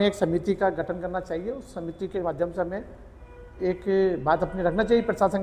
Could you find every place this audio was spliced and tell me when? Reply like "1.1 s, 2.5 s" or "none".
none